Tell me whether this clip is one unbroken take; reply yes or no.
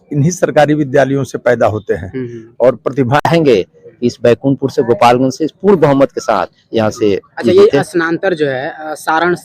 no